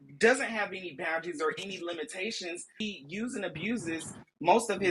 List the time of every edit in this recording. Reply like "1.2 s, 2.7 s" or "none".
2.7 s